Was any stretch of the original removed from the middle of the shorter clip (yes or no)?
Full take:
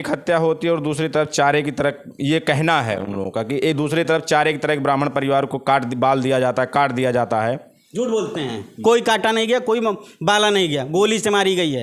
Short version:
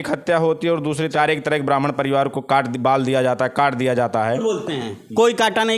yes